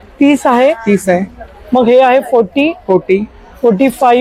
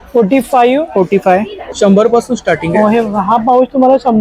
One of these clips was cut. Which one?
second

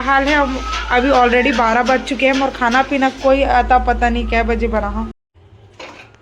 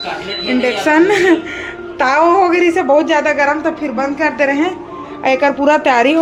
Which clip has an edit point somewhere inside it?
first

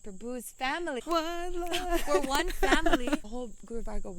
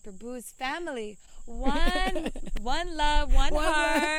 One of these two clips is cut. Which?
first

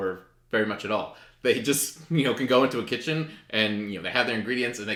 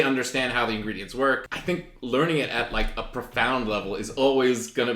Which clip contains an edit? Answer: second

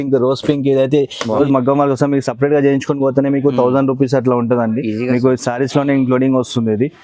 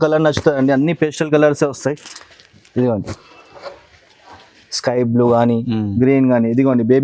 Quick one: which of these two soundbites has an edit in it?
first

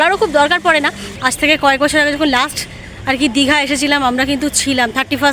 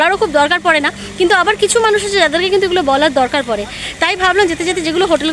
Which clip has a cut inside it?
first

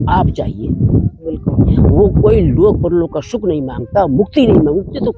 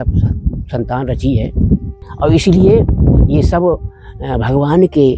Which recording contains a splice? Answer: second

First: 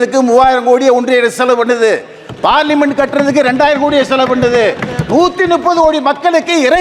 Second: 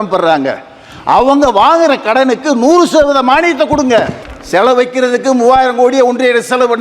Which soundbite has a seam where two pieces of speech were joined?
second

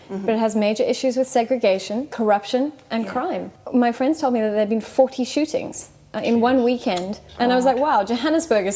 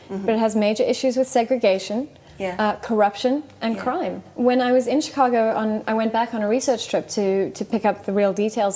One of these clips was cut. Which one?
first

